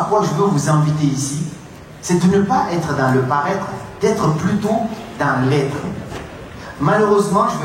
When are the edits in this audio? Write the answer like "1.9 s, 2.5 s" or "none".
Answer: none